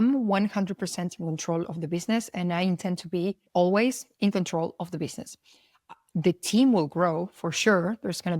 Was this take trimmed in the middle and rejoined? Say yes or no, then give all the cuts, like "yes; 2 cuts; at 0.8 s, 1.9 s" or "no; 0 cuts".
yes; 1 cut; at 3.4 s